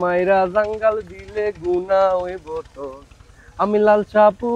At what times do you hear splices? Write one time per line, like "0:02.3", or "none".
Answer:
none